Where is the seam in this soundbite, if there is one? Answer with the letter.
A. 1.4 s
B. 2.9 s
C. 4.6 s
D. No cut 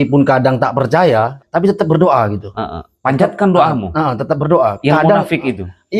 A